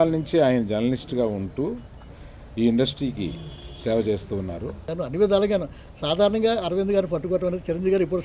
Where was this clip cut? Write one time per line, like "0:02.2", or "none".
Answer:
0:04.9